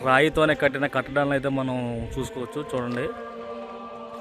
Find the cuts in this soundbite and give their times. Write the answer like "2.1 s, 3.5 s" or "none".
none